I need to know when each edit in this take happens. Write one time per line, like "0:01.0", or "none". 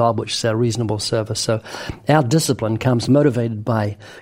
0:03.0

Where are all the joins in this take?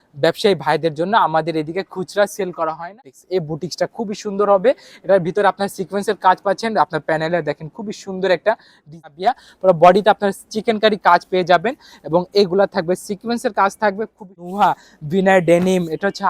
0:02.9
0:09.1
0:14.4

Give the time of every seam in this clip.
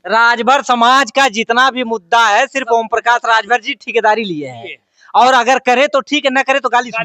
none

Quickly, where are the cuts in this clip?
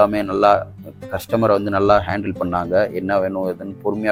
none

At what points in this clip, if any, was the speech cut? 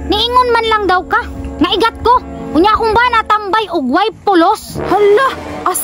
none

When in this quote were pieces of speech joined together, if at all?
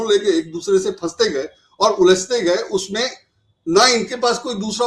none

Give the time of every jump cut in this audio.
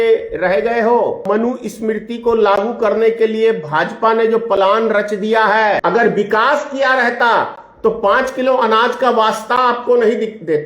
0:01.2
0:05.8

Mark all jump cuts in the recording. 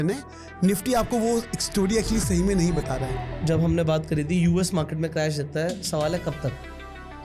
0:03.3

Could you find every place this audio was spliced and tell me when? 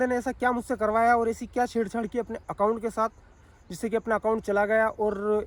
none

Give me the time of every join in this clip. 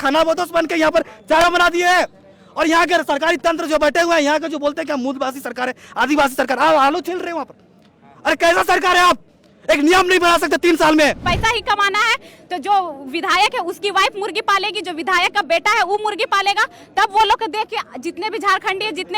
0:01.4
0:11.3

